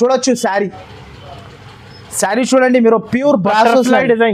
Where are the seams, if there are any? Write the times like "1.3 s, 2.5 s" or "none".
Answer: none